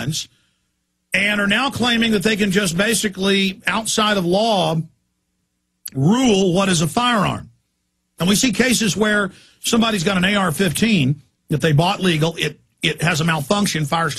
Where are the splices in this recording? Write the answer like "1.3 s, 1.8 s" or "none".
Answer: 1.5 s